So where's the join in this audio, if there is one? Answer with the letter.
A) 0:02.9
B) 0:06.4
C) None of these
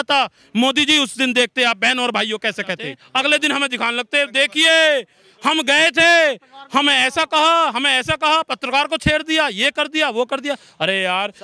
A